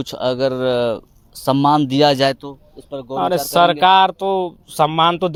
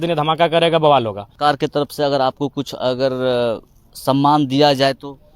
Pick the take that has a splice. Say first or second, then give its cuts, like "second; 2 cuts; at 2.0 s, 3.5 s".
second; 1 cut; at 1.2 s